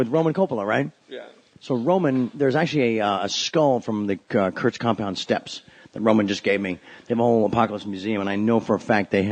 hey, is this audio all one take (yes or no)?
no